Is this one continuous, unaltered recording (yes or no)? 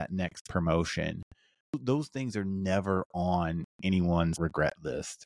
no